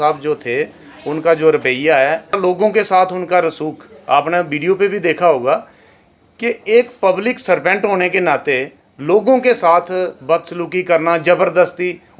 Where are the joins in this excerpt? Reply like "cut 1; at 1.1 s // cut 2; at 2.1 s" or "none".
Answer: none

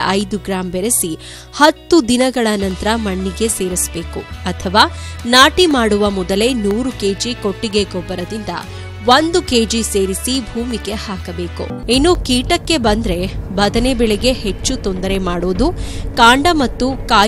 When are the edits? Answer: cut 1; at 11.8 s

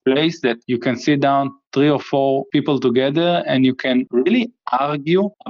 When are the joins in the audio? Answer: cut 1; at 2.4 s // cut 2; at 4.1 s

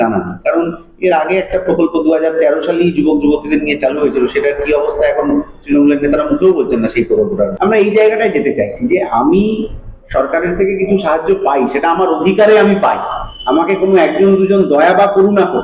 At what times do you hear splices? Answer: cut 1; at 7.5 s

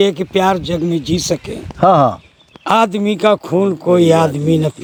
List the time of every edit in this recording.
none

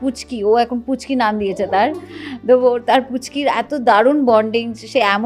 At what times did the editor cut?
none

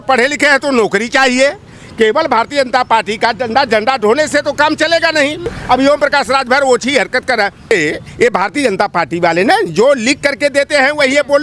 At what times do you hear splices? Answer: cut 1; at 5.5 s // cut 2; at 7.7 s

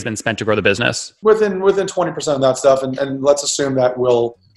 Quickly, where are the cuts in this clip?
cut 1; at 1.0 s

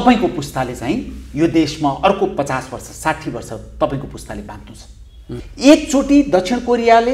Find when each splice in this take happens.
cut 1; at 5.5 s

